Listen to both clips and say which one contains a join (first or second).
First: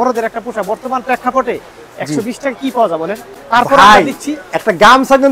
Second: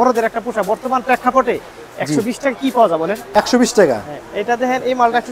second